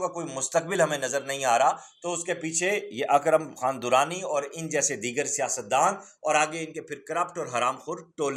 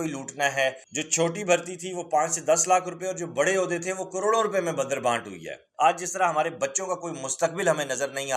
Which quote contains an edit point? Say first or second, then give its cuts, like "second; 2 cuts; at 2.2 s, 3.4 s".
second; 2 cuts; at 0.9 s, 5.7 s